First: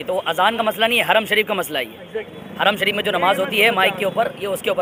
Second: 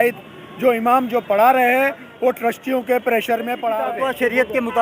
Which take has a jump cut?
second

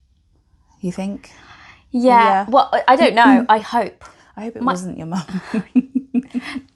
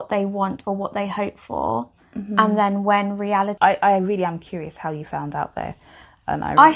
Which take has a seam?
second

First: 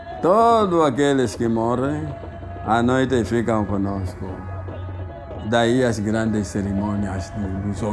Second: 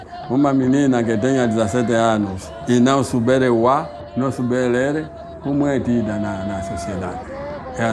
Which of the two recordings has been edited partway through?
second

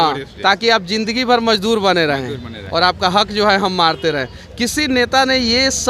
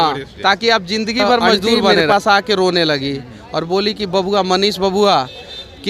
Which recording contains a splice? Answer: second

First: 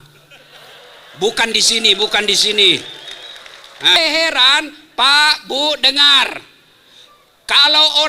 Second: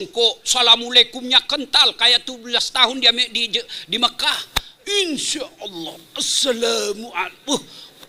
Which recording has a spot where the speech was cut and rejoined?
first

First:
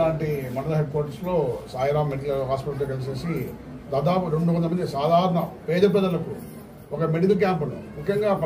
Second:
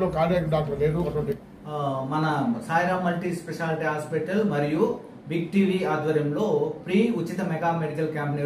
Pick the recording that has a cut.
second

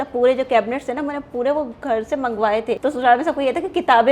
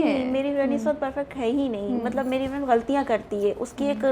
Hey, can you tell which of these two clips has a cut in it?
first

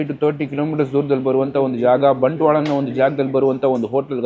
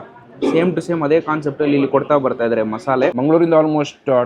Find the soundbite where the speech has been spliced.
second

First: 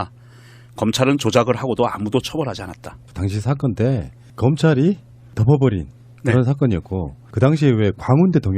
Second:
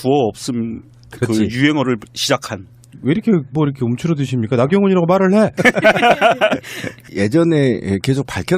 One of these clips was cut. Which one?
first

